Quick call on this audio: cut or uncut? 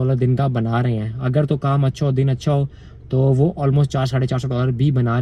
uncut